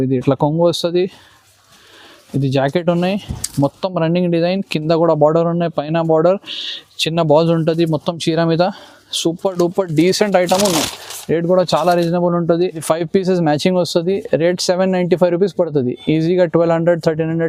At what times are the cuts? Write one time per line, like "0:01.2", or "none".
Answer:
none